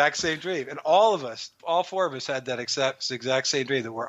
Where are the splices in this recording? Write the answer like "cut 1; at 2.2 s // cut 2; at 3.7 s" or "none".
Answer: cut 1; at 1.5 s